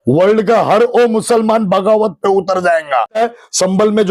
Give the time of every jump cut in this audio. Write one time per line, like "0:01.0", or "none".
0:03.2